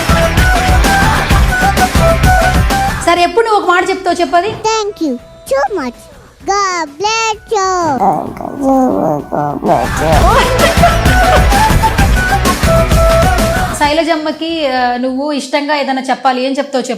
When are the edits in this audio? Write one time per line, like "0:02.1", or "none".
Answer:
0:03.0
0:13.7